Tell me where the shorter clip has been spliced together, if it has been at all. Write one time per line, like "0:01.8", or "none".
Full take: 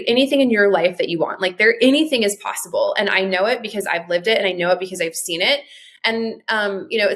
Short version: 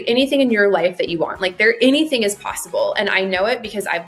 none